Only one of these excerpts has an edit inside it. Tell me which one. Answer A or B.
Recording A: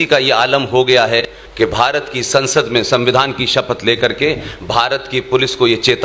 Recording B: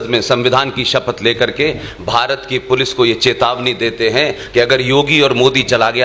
A